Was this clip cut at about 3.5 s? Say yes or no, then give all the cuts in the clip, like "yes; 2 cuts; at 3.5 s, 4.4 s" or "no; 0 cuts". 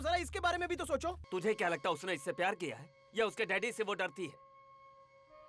no; 1 cut; at 1.2 s